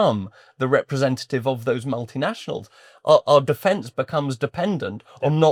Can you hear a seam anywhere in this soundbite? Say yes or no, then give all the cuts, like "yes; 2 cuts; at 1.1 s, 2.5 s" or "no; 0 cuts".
no; 0 cuts